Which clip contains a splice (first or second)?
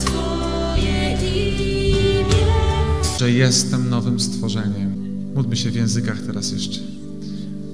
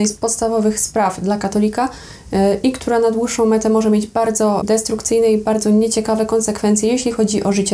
second